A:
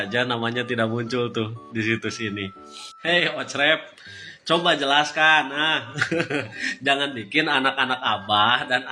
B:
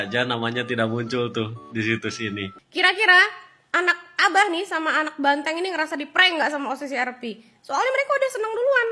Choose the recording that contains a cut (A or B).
B